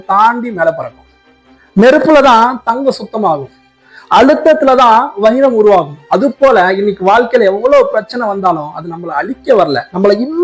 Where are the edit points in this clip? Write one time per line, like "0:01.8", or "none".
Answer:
none